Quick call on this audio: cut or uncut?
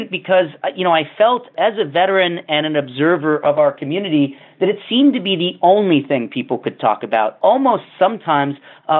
cut